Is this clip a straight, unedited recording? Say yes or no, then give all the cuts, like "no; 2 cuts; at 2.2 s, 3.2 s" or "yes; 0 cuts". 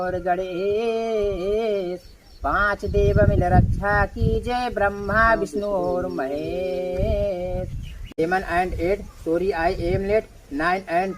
no; 1 cut; at 8.0 s